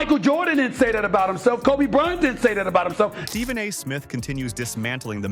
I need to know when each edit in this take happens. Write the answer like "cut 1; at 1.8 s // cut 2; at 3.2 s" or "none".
none